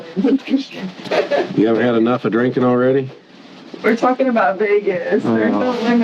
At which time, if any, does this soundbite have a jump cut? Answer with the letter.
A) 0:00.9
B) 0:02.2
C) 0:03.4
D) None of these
A